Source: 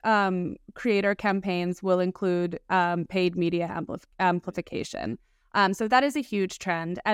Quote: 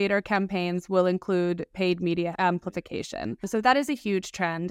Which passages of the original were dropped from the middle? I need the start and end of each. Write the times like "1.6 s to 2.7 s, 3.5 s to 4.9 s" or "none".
2.7 s to 3.6 s, 5.3 s to 5.7 s